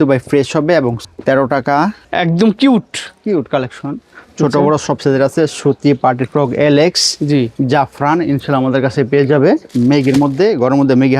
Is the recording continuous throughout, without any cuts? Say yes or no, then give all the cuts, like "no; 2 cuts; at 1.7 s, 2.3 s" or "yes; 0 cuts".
no; 3 cuts; at 1.1 s, 2.0 s, 9.7 s